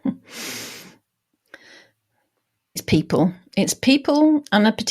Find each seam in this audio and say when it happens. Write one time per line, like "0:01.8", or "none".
0:02.8